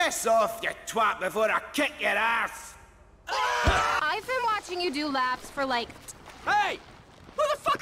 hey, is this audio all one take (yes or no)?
no